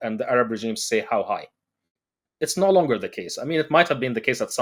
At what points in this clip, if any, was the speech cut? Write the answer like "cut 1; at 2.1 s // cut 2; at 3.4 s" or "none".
none